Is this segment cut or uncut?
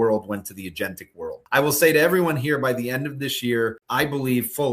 cut